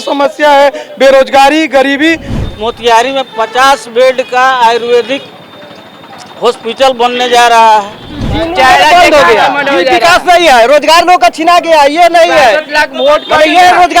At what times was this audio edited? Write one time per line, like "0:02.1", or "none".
0:02.3
0:08.3